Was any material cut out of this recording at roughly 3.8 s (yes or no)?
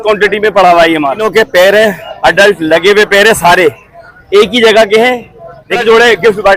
no